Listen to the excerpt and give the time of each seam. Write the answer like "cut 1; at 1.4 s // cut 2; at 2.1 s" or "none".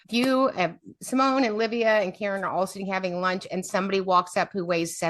none